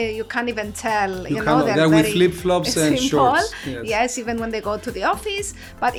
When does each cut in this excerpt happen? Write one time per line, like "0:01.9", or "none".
none